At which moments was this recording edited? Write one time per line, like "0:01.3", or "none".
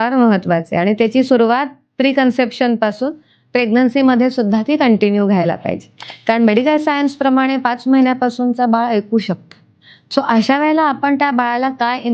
none